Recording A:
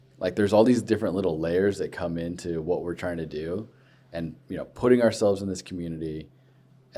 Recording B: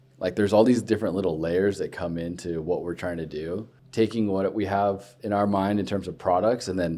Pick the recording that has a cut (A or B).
B